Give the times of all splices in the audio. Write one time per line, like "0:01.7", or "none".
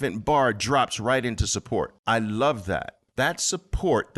0:02.0
0:03.0